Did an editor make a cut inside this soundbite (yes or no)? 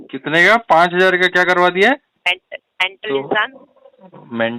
yes